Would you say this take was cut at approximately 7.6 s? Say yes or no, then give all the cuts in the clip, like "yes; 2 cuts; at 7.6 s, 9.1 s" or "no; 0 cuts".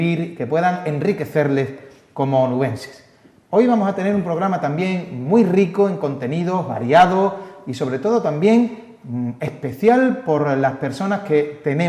no; 0 cuts